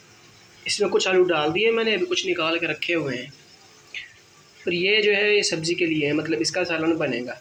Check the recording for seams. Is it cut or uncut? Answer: uncut